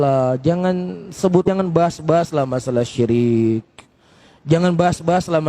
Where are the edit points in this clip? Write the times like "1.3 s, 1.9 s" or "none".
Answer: 1.5 s